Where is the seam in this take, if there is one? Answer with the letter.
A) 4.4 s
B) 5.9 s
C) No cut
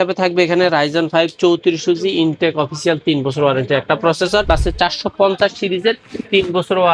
A